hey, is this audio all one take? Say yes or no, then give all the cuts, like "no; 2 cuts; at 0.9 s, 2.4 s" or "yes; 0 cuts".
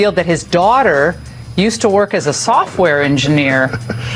yes; 0 cuts